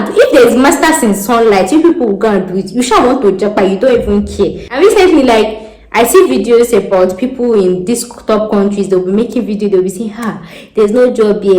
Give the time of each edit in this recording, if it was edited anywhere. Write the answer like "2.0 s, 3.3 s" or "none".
4.7 s